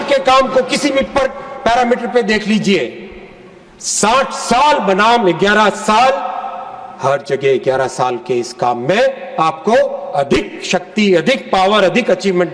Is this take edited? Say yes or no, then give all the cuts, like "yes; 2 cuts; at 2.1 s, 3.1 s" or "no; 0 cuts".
no; 0 cuts